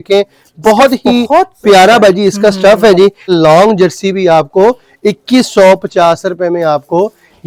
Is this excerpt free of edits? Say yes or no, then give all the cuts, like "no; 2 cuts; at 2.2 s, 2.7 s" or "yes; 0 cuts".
no; 1 cut; at 3.3 s